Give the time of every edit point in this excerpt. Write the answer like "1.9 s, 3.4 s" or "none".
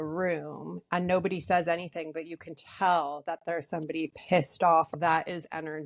4.9 s